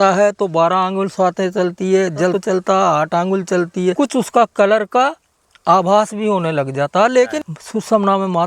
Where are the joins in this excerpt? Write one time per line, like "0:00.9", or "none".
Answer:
0:02.3
0:03.9
0:07.4